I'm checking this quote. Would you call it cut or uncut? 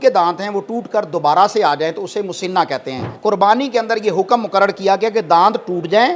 cut